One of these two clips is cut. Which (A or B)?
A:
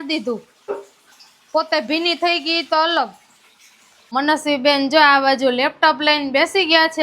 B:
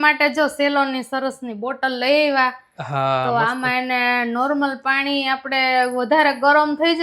A